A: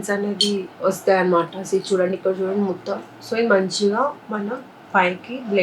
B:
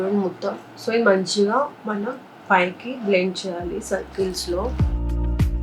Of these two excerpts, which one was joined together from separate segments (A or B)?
B